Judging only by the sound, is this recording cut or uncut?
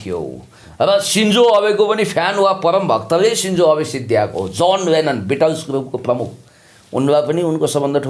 uncut